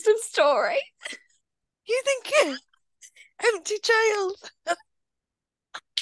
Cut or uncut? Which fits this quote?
uncut